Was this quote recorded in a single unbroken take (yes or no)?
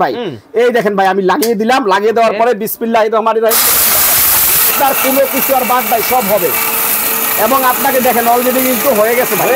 no